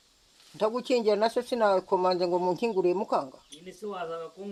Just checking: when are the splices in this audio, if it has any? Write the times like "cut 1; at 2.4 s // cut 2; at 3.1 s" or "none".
none